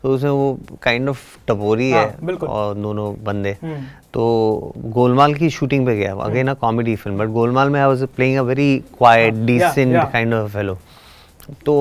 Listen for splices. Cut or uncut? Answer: uncut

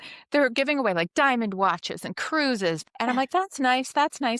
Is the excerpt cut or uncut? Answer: cut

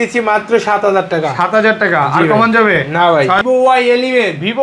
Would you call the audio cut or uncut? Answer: cut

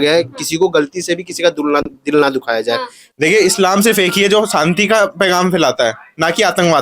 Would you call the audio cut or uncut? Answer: cut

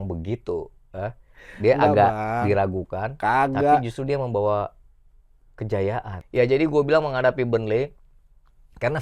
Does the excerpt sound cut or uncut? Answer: cut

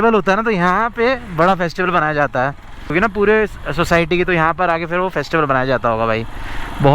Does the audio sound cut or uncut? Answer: cut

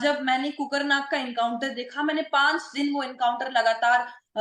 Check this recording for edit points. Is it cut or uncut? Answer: uncut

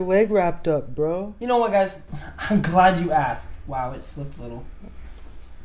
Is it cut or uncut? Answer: uncut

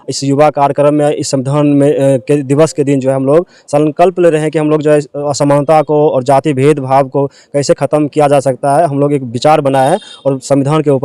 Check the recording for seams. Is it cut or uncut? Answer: uncut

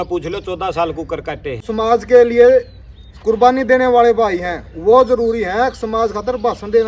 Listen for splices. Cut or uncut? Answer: cut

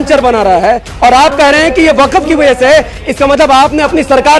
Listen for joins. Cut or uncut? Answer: uncut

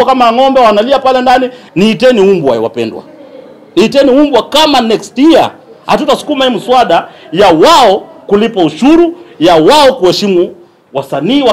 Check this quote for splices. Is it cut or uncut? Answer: cut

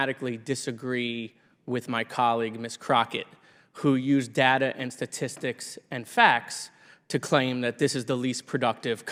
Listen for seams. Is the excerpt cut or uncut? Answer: uncut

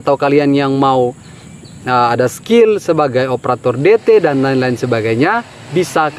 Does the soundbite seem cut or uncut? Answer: uncut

